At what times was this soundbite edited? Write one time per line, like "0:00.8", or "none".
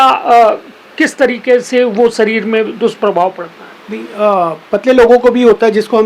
none